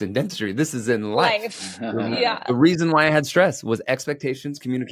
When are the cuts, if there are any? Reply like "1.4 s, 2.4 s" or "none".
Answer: none